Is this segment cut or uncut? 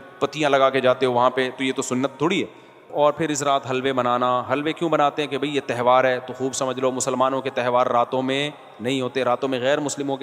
cut